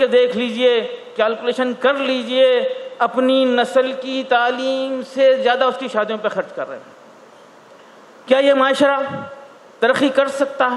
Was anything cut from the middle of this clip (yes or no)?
no